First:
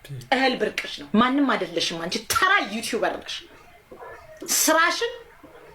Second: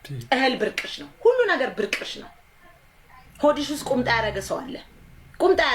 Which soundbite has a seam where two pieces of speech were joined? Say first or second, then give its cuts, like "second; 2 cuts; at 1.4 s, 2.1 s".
first; 1 cut; at 0.9 s